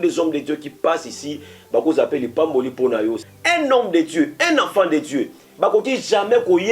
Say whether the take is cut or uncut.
cut